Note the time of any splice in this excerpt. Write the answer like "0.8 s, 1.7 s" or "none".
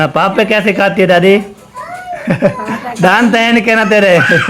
2.1 s